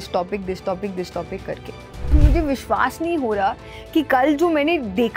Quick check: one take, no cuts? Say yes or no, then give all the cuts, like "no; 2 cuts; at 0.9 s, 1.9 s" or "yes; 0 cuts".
no; 1 cut; at 2.1 s